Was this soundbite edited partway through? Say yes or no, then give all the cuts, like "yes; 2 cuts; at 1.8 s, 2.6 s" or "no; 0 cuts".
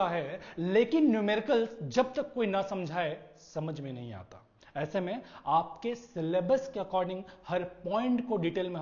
no; 0 cuts